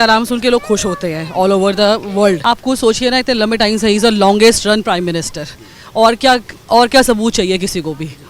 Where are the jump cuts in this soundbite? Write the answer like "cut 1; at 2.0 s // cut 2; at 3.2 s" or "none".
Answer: cut 1; at 2.4 s